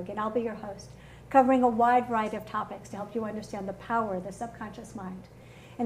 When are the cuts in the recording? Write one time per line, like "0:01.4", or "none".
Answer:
0:04.9